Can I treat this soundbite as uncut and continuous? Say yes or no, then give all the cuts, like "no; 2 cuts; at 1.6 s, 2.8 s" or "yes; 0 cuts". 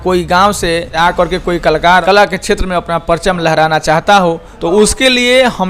no; 3 cuts; at 0.9 s, 2.0 s, 4.5 s